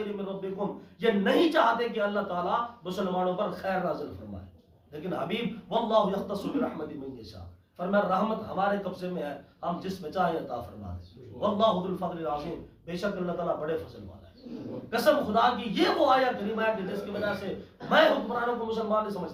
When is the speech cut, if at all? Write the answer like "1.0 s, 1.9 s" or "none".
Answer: none